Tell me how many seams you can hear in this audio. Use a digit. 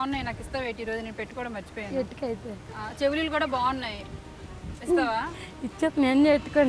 1